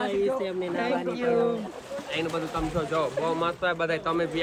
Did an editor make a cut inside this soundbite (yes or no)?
no